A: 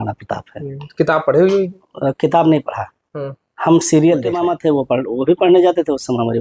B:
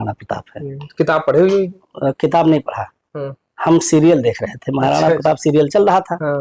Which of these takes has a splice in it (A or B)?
A